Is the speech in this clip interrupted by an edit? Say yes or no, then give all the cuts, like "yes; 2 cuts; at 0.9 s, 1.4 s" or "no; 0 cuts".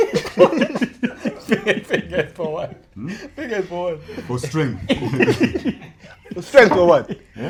no; 0 cuts